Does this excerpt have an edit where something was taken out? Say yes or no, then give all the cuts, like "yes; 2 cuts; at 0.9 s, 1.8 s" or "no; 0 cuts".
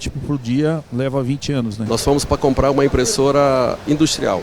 yes; 1 cut; at 1.8 s